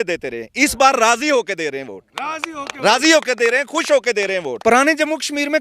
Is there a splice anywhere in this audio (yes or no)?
yes